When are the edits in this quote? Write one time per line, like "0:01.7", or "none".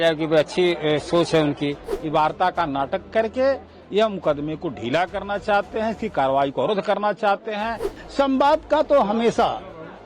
0:01.9
0:07.9